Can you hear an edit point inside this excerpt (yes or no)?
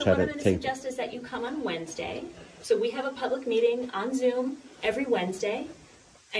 no